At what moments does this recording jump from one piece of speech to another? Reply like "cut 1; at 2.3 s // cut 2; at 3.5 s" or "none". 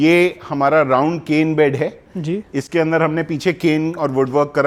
none